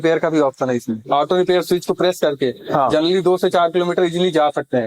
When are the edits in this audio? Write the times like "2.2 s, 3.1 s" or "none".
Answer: 1.0 s